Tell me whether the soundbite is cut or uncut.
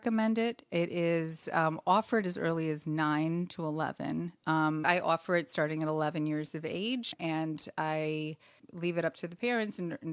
cut